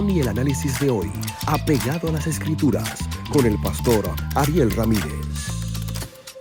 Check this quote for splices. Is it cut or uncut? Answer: uncut